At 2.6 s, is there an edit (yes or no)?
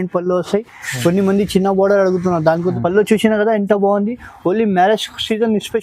yes